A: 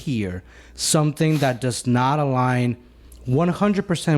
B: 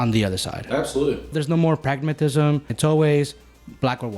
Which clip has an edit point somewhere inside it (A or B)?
B